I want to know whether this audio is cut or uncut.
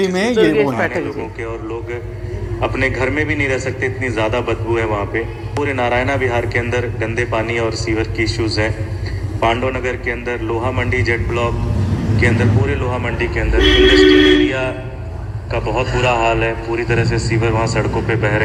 uncut